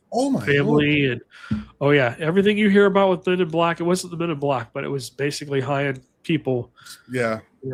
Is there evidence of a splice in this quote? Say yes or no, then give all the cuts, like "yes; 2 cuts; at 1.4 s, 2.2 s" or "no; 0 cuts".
no; 0 cuts